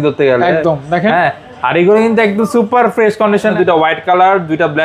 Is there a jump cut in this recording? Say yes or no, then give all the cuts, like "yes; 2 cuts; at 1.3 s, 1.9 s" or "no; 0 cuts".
yes; 1 cut; at 3.5 s